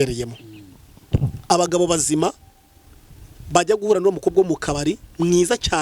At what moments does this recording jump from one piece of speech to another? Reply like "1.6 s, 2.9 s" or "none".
none